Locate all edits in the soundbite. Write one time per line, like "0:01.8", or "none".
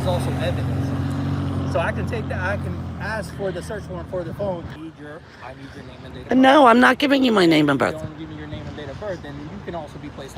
0:04.8

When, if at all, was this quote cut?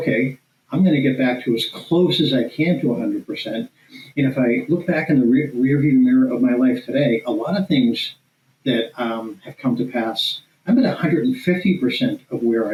none

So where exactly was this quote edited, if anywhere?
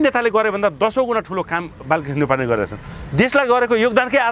none

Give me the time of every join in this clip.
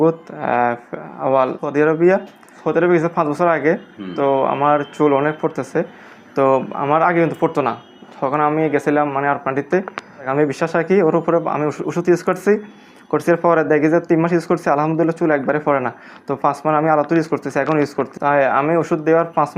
0:01.6
0:02.5
0:10.3

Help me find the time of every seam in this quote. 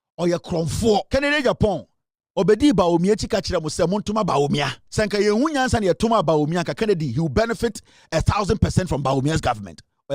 0:01.1
0:04.8

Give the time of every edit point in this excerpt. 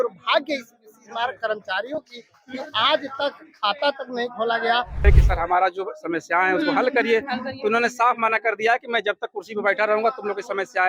0:05.0

